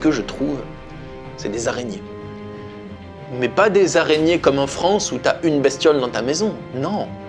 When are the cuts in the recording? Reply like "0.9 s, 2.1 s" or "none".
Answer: none